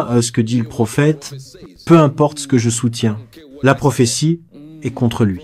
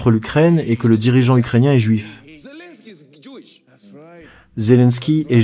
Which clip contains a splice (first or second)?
second